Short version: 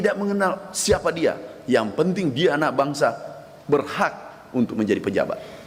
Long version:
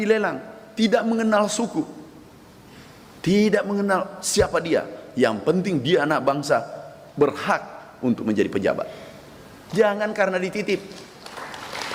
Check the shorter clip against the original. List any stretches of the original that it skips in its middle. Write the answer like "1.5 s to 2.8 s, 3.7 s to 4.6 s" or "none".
none

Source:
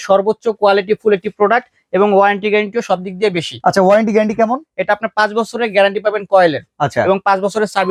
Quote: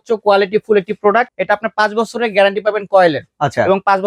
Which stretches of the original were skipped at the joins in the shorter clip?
1.7 s to 4.7 s

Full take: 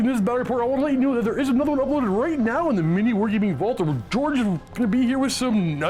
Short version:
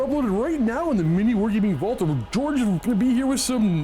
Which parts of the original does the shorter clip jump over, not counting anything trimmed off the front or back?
4.6 s to 4.7 s

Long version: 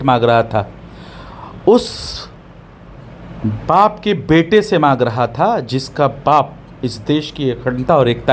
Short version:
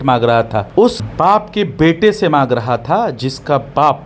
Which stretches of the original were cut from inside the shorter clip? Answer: 1.1 s to 3.6 s

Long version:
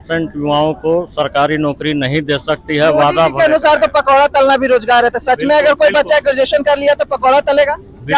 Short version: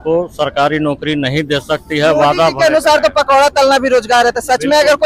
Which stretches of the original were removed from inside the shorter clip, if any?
none

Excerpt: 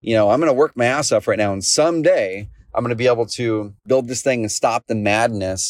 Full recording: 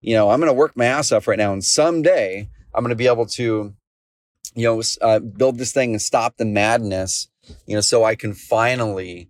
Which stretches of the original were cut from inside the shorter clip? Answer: 3.8 s to 5.3 s

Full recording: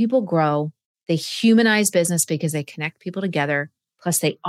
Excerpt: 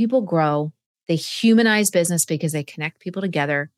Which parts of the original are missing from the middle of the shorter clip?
none

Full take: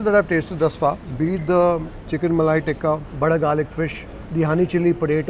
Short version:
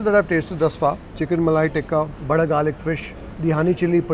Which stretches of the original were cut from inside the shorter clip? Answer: 1.0 s to 2.0 s

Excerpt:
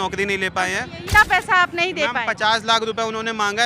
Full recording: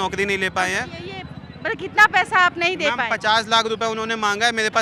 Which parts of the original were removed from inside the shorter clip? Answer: 1.1 s to 1.9 s

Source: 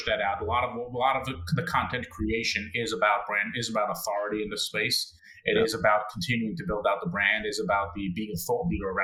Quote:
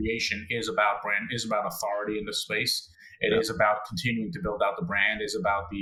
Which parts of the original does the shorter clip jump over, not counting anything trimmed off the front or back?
none

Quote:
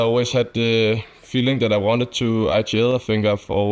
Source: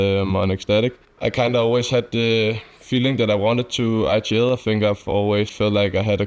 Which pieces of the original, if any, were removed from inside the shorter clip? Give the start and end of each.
none

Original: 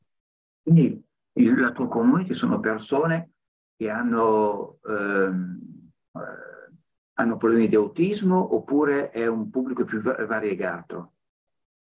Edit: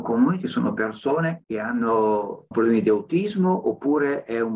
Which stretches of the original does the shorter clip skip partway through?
3.3 s to 3.7 s, 4.8 s to 7.4 s

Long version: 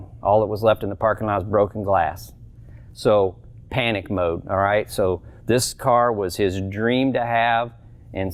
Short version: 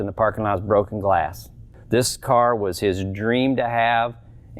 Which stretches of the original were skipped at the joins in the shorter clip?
2.6 s to 5.3 s

